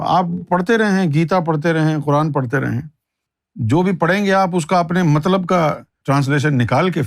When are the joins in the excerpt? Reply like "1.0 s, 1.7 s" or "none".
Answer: 5.9 s